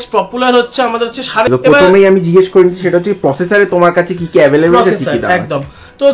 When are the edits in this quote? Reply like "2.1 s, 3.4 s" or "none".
1.5 s